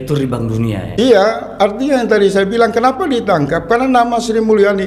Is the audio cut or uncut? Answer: uncut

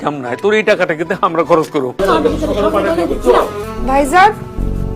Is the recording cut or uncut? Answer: cut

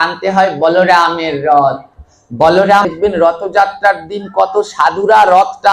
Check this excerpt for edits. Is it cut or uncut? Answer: cut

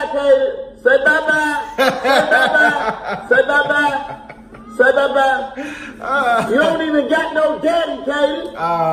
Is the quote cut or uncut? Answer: uncut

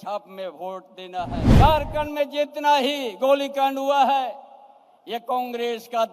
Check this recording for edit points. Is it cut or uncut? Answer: cut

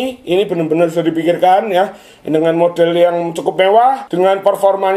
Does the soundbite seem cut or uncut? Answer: uncut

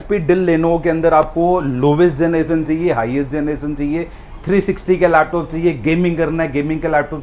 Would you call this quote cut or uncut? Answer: uncut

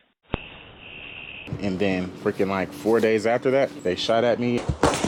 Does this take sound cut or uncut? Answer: uncut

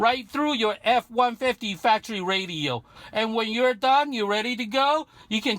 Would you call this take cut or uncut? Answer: cut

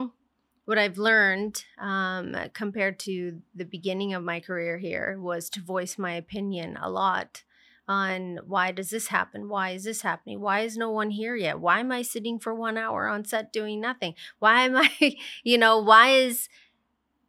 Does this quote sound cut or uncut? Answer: uncut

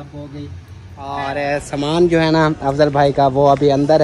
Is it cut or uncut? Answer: cut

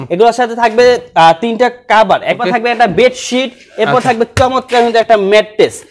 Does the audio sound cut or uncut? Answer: cut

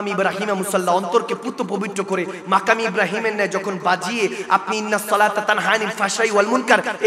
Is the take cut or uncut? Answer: uncut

